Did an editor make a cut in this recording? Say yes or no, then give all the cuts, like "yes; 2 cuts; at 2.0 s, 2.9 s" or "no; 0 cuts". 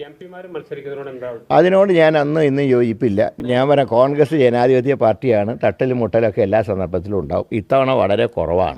yes; 1 cut; at 3.3 s